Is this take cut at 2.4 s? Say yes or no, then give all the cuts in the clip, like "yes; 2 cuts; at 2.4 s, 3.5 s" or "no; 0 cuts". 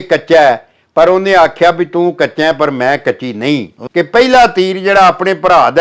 no; 1 cut; at 3.8 s